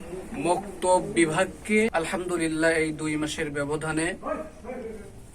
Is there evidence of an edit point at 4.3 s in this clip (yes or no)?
no